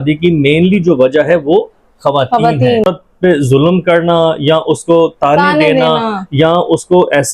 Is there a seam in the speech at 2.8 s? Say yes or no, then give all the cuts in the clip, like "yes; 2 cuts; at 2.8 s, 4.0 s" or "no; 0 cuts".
yes; 1 cut; at 2.8 s